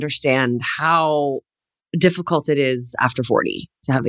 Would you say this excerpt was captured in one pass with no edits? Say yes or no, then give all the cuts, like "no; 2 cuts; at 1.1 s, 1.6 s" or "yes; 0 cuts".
yes; 0 cuts